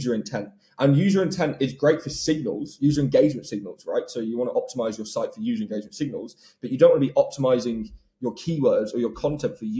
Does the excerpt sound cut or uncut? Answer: uncut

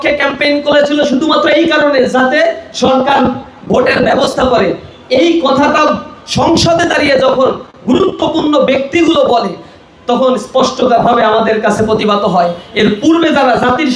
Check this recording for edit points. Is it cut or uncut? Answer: uncut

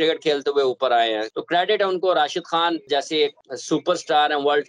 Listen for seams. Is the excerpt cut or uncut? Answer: cut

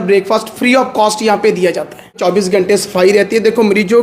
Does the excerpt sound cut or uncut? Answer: cut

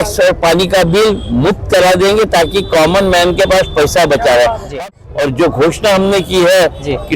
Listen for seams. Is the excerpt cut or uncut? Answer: cut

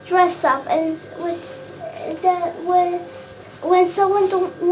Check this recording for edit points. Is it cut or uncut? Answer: uncut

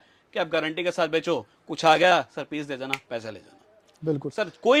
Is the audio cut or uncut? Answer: uncut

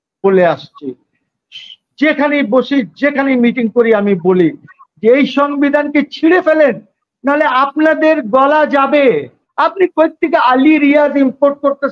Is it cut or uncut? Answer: cut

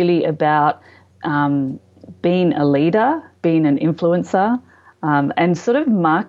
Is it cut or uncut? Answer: uncut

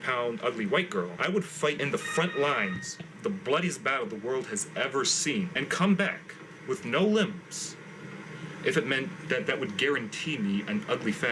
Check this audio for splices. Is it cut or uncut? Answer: cut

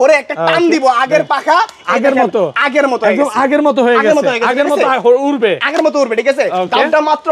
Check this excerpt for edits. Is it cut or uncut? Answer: uncut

